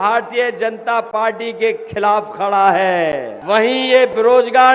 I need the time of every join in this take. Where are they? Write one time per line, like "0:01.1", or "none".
0:03.3